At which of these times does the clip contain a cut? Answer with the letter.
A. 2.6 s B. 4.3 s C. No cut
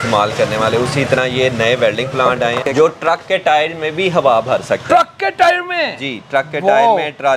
A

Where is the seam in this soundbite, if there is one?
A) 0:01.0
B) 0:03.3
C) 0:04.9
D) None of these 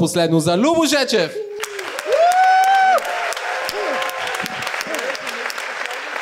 D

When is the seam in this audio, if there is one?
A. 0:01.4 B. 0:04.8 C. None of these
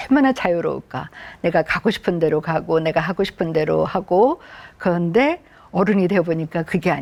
C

